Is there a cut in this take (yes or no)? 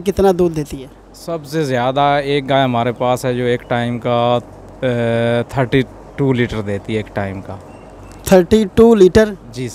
no